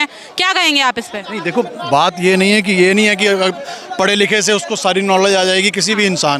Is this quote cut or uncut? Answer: uncut